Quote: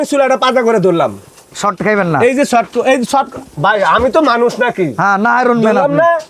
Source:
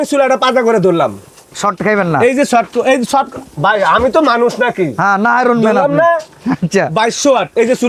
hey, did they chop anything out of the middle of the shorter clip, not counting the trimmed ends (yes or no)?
no